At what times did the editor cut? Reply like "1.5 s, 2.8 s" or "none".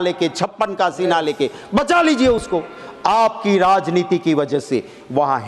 none